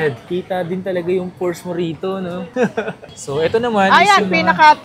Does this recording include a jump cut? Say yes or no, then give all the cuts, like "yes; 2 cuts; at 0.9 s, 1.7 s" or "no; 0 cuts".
yes; 1 cut; at 3.0 s